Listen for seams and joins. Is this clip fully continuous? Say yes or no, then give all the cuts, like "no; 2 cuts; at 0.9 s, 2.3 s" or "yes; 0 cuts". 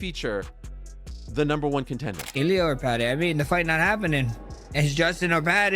no; 1 cut; at 2.2 s